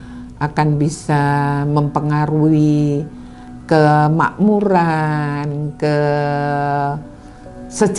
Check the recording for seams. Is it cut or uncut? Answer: uncut